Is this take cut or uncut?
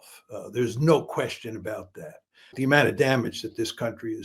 cut